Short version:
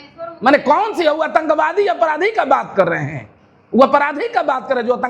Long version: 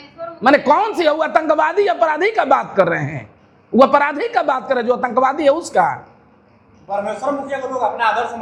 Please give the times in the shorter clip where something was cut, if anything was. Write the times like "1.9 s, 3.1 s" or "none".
none